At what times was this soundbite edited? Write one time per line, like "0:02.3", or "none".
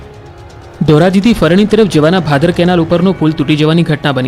none